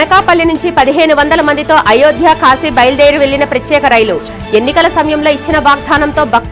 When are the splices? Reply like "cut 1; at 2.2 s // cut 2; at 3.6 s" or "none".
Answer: none